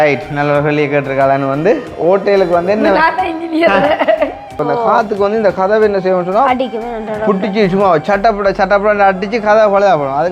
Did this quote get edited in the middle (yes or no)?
yes